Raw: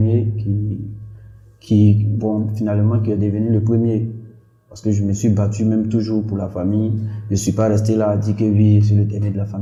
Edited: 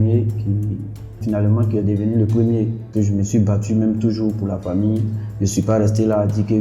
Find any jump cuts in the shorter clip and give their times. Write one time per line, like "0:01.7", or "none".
0:01.2
0:02.8